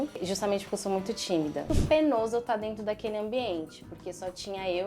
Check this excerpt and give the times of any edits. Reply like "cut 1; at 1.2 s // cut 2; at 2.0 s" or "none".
cut 1; at 1.7 s